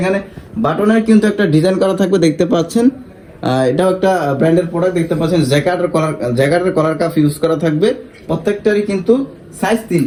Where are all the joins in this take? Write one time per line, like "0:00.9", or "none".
none